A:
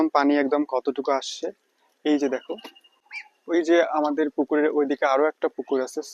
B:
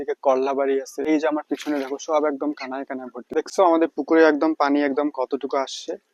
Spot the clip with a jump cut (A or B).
B